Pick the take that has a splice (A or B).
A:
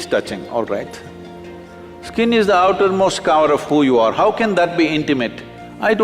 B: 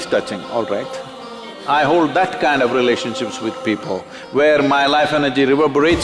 B